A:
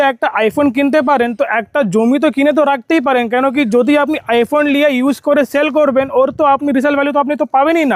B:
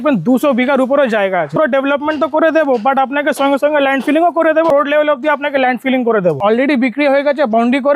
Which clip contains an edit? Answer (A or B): B